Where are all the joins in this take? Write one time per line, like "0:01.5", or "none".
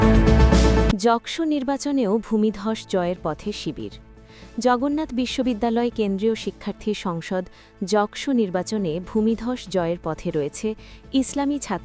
0:00.9

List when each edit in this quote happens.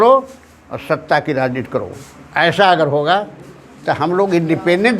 none

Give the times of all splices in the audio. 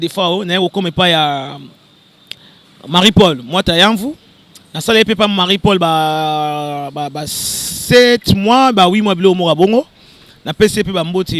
none

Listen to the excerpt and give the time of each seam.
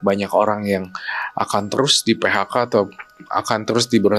none

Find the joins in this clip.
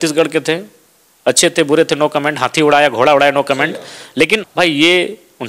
0:04.5

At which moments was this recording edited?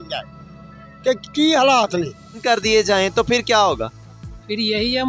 0:02.4

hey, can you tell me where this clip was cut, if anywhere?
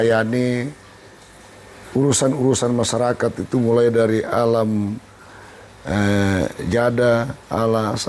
none

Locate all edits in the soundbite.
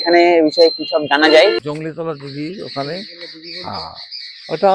0:01.6

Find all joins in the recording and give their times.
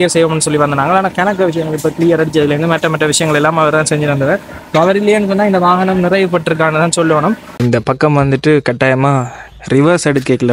0:07.6

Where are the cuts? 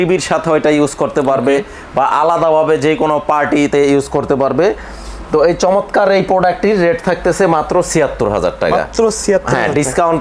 none

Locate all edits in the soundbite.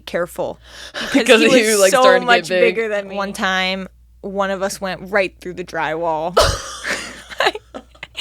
0:03.1

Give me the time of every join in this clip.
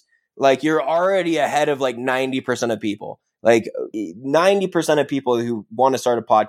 0:03.9

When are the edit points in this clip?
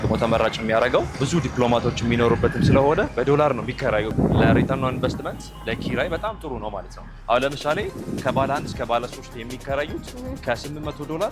0:01.2
0:03.1
0:04.1

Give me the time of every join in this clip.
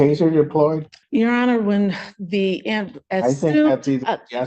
0:00.9

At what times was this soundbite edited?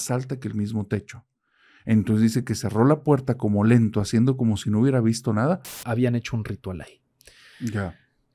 0:05.9

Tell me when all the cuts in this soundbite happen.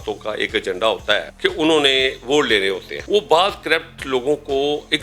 0:01.3
0:02.9

